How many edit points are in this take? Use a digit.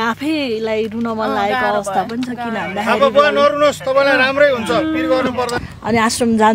1